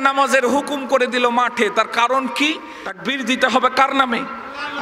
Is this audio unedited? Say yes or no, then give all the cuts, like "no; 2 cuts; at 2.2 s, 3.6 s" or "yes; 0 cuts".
no; 1 cut; at 3.0 s